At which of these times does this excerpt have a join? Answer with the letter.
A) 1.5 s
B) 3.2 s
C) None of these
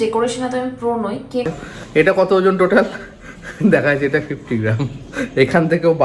A